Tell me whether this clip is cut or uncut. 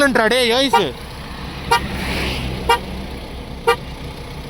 uncut